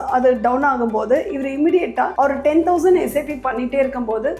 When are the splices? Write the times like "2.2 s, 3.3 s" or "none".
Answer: 2.1 s